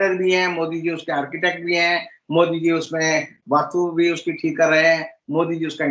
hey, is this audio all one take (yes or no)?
yes